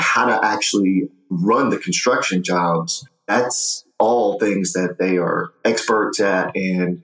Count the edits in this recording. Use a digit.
2